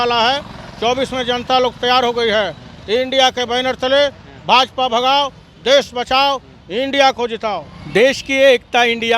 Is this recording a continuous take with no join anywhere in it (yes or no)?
no